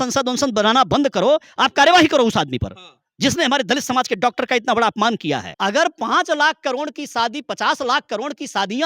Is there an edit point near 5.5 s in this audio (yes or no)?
yes